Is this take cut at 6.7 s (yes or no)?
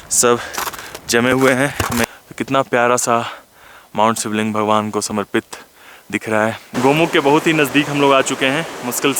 yes